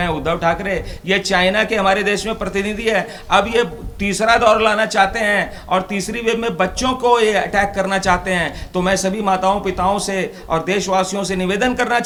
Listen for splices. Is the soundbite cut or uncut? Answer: uncut